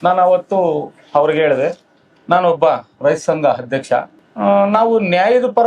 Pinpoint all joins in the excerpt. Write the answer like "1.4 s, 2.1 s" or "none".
4.2 s